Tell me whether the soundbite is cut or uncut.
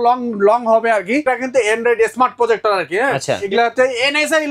cut